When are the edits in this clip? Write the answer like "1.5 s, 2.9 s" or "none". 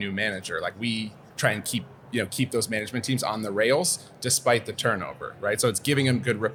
none

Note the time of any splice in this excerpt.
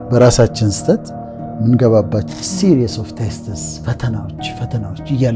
2.3 s

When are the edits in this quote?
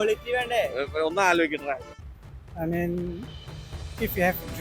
1.9 s

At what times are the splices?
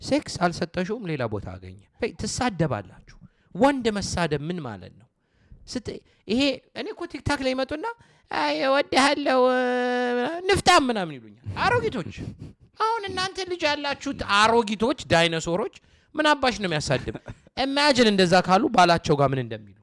1.9 s

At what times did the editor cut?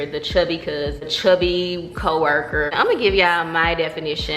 1.1 s, 2.7 s

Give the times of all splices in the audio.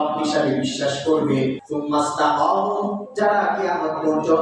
1.6 s

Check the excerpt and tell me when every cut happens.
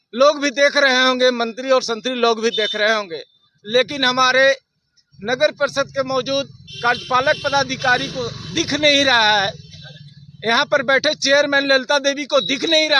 none

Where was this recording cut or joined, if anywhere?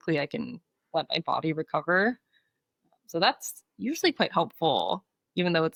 none

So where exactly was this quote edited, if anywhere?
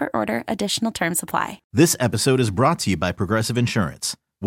1.6 s

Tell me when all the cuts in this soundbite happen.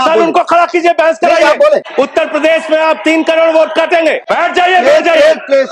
1.9 s, 4.2 s

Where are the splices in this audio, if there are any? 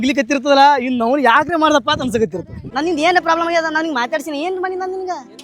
2.7 s

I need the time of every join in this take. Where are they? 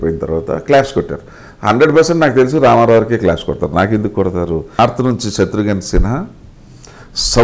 4.8 s

